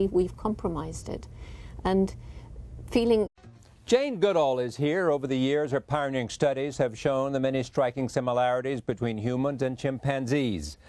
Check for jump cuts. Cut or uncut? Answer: uncut